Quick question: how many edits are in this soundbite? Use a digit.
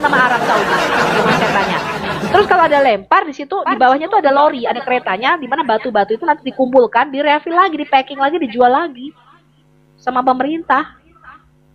0